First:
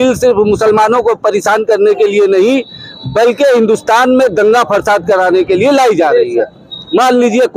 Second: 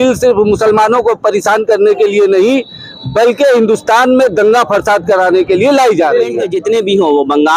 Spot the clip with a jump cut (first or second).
second